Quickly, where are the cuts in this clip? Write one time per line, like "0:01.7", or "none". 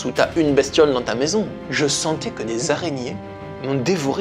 0:01.6